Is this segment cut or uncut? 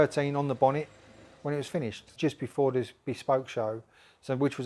cut